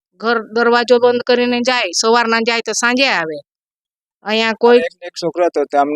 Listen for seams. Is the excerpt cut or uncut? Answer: cut